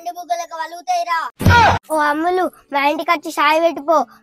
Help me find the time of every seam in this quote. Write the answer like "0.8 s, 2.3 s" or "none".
1.8 s

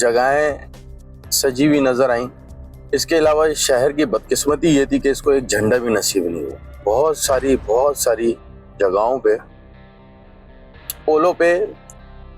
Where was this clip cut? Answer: 6.8 s

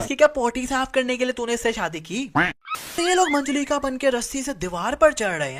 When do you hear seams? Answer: 3.0 s

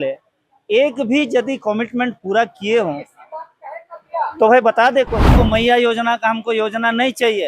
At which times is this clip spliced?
5.3 s

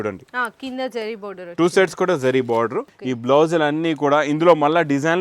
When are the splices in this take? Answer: 2.9 s

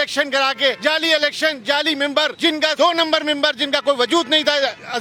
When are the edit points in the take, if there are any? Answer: none

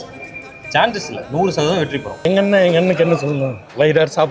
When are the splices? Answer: 2.2 s

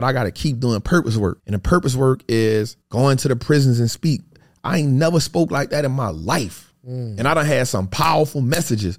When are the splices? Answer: 1.5 s, 2.8 s, 4.4 s

